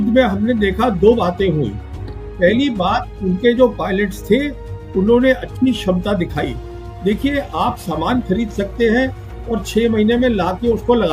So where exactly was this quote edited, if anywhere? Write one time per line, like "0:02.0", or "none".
none